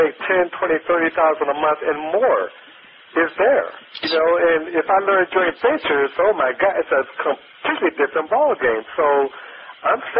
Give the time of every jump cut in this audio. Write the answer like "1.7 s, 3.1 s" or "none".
none